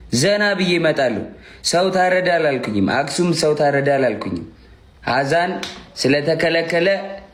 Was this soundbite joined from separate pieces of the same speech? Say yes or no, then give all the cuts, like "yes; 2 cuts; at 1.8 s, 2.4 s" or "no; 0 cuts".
no; 0 cuts